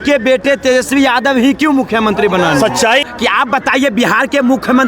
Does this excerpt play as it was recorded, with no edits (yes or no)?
no